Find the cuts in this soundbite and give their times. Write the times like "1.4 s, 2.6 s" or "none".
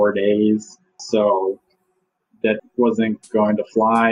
1.0 s, 2.6 s